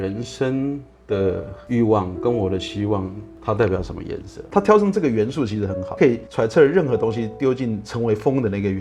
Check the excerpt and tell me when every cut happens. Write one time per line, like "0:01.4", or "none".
0:04.3